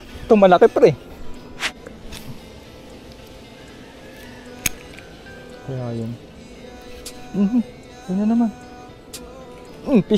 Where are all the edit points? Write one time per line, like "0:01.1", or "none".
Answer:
0:01.7